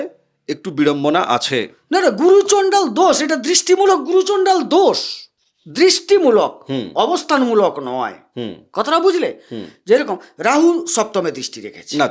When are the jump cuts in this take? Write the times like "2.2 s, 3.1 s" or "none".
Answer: none